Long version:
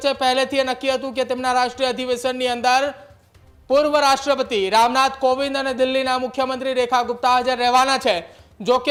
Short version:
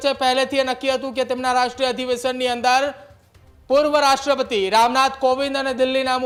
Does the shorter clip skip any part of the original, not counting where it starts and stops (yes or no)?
no